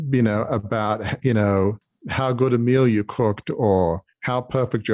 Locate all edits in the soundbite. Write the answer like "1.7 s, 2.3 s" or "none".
none

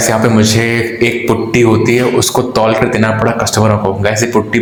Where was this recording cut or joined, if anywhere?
none

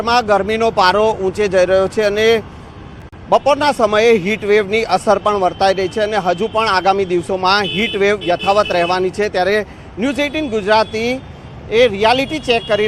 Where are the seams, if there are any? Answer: none

